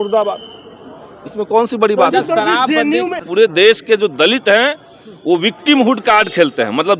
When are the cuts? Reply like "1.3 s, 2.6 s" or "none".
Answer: 3.2 s